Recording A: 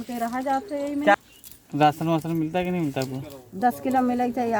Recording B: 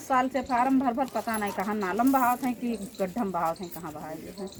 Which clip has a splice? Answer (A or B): A